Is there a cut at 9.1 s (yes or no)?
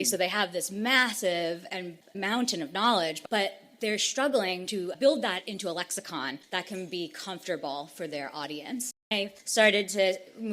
yes